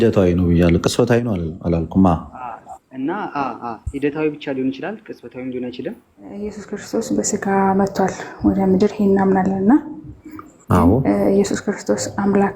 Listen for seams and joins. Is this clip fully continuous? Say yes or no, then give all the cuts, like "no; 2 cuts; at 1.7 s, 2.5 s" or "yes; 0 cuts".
no; 1 cut; at 6.6 s